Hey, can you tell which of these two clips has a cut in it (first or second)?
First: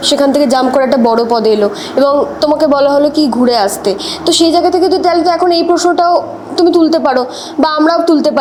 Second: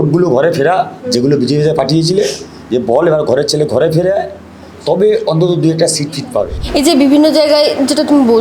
second